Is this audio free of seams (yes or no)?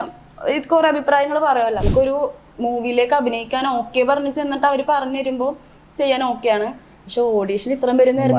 no